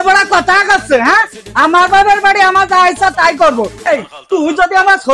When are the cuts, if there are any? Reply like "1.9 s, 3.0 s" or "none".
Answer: 3.9 s